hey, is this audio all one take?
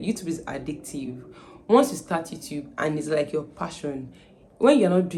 yes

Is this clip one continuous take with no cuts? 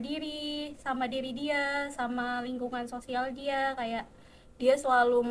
yes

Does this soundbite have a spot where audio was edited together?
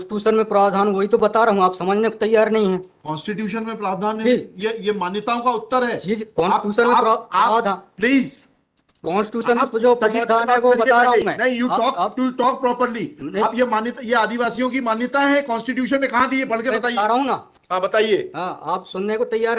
no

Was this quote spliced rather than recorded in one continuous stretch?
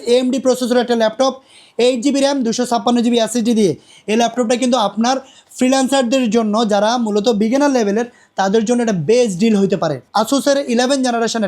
yes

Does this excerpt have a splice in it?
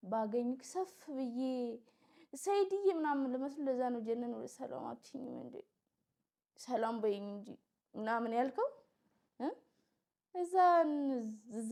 no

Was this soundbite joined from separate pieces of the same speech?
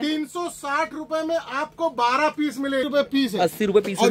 yes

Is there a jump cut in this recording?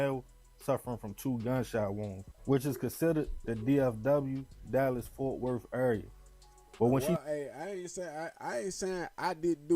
yes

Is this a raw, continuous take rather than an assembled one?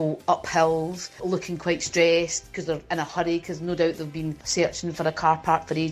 no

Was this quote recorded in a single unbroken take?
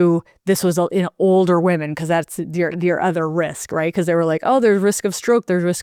yes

